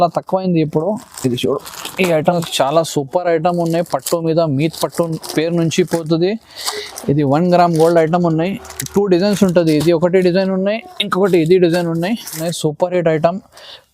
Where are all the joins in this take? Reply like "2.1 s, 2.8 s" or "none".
2.3 s, 12.4 s